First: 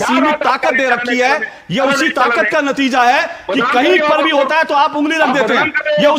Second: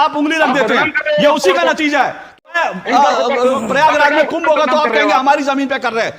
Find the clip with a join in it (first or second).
second